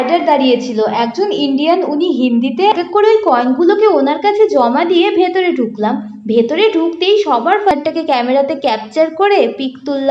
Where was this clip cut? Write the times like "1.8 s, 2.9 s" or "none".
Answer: 2.7 s, 7.7 s